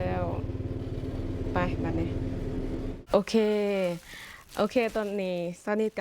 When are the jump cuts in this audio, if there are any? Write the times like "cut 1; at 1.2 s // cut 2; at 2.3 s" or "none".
cut 1; at 2.9 s